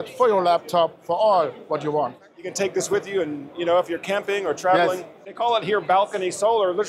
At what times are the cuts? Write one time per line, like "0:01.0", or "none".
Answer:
0:02.4
0:05.2